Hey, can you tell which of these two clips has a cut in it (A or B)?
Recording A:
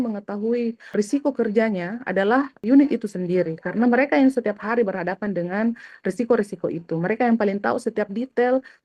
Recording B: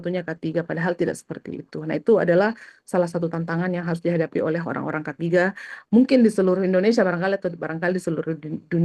A